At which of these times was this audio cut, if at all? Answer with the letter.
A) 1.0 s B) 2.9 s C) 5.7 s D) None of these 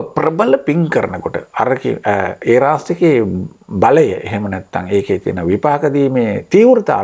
D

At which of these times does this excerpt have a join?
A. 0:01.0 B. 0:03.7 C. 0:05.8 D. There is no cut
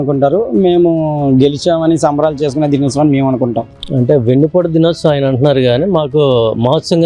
B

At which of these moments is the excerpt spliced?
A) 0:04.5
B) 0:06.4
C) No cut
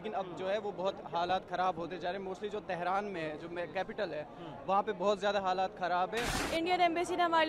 B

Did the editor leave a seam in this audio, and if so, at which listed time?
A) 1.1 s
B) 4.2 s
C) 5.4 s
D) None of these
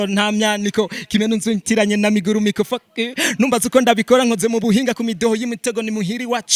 D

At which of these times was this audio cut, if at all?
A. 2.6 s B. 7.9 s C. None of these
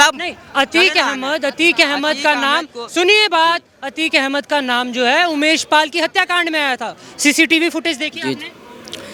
C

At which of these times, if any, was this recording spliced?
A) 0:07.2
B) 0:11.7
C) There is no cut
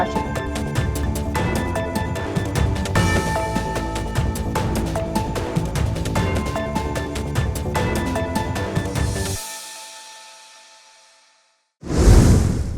B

